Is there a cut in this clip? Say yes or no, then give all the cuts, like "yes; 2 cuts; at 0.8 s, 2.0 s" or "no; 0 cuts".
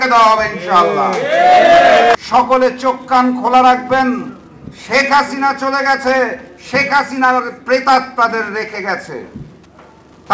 yes; 1 cut; at 2.1 s